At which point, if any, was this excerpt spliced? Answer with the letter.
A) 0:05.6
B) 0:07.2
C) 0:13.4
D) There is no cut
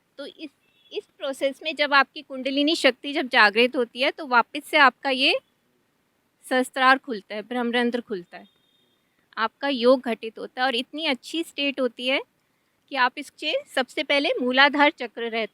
C